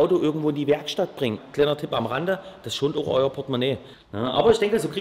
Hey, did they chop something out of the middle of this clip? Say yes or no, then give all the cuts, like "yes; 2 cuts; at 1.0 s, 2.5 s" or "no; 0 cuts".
yes; 2 cuts; at 1.4 s, 3.9 s